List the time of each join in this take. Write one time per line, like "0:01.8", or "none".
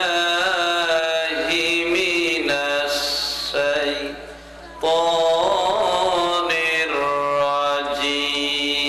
none